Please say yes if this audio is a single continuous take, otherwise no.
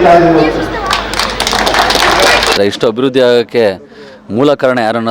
no